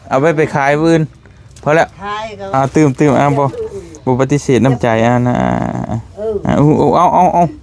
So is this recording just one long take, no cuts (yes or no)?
no